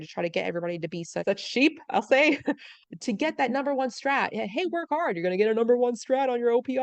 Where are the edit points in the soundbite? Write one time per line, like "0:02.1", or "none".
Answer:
0:01.2
0:02.8